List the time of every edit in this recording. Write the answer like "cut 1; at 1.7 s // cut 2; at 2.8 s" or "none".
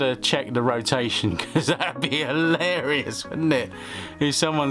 none